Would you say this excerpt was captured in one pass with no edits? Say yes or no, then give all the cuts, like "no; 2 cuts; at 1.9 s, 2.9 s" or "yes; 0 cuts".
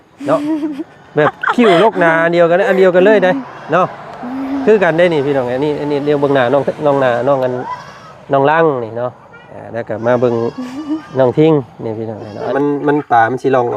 no; 1 cut; at 12.5 s